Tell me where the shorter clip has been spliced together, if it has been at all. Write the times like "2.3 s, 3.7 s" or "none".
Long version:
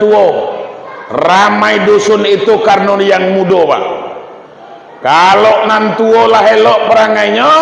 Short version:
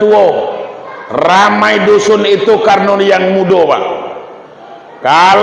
none